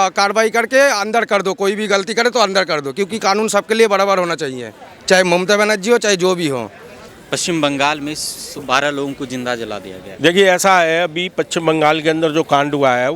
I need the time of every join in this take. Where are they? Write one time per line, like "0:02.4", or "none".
none